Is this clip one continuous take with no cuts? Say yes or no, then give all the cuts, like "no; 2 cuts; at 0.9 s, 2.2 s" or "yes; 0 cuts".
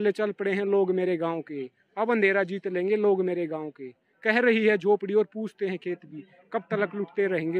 yes; 0 cuts